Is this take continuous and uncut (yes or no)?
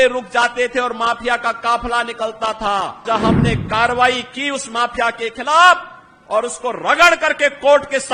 no